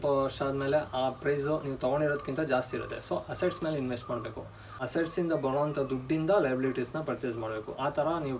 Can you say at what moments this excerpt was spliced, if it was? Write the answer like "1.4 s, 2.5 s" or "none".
4.7 s

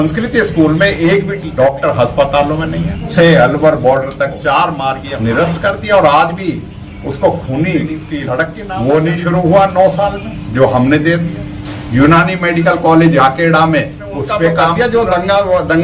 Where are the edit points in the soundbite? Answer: 1.4 s, 3.1 s, 5.0 s, 8.6 s, 14.6 s

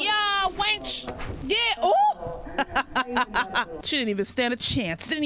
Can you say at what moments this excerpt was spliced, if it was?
3.8 s

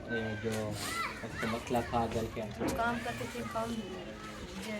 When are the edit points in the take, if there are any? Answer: 2.4 s

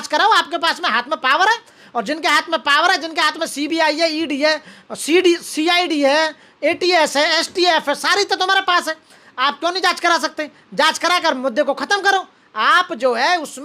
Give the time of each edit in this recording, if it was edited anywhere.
none

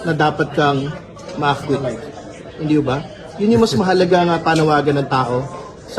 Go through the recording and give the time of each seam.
none

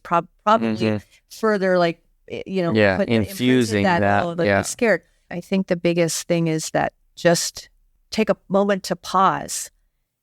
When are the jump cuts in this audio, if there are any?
5.2 s, 8.0 s

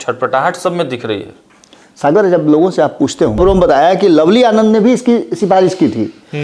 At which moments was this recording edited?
3.4 s

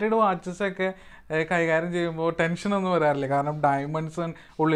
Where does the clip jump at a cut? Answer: none

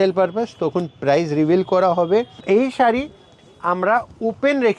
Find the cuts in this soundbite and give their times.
2.4 s

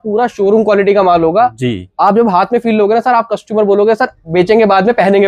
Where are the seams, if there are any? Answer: 4.2 s

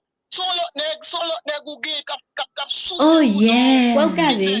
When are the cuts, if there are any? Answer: 3.0 s

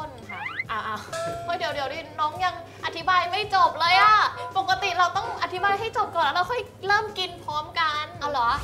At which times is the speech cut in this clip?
none

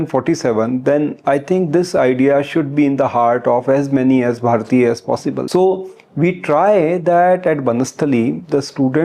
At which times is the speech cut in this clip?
5.4 s

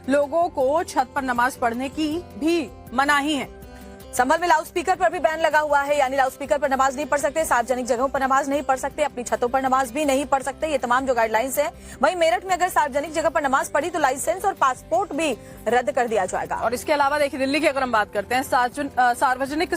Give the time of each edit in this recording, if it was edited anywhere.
18.8 s

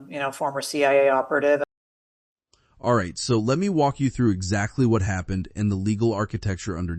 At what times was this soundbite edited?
none

